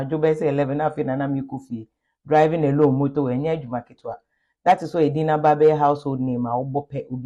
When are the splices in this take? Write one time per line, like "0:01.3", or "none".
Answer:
none